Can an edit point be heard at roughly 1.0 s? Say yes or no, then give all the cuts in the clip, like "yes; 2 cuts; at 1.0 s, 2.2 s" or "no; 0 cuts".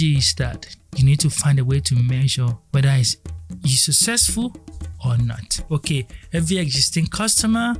no; 2 cuts; at 2.6 s, 5.5 s